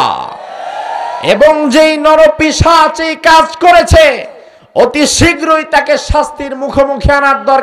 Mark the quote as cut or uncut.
uncut